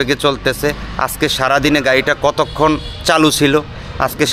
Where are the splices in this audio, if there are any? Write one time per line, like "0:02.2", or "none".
none